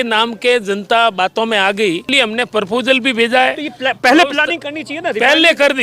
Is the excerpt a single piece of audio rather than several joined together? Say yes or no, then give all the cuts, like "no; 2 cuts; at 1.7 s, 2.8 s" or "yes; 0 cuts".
no; 1 cut; at 2.0 s